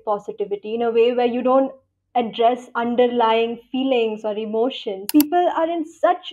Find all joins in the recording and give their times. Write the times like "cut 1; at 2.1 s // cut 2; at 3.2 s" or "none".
cut 1; at 5.0 s